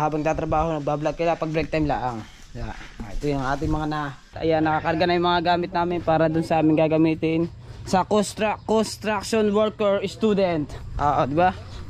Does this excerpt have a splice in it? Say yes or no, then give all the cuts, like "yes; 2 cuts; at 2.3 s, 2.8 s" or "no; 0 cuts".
yes; 1 cut; at 4.4 s